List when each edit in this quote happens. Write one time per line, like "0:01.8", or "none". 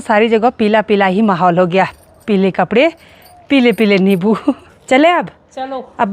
0:04.7